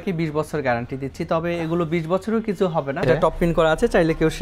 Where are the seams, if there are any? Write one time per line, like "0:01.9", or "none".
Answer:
0:03.0

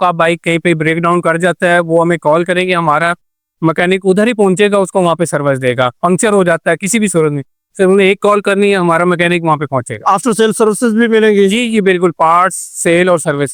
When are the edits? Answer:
none

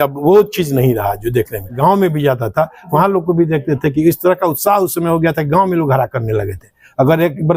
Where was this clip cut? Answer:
0:01.6

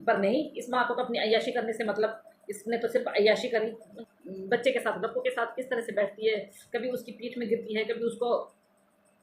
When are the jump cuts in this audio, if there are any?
0:03.9

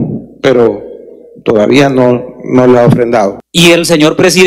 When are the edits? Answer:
0:03.4

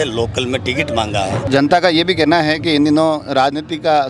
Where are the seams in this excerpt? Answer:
0:01.4

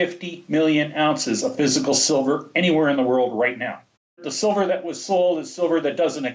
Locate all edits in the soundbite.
0:04.3

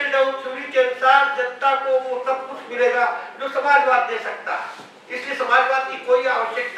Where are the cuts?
none

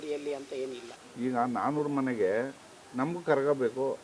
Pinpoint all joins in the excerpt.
0:01.0

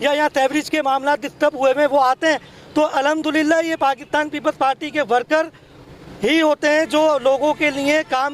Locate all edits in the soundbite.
none

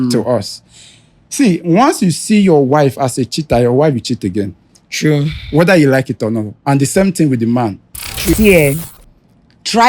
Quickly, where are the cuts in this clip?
0:08.0

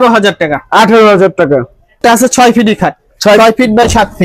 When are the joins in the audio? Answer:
none

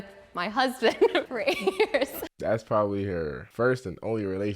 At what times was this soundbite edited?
0:02.3
0:03.4

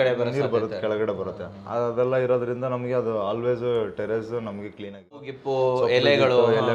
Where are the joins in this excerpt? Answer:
0:05.3

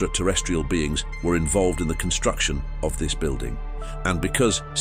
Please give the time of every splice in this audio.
none

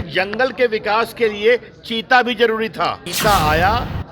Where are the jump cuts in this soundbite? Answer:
0:03.1

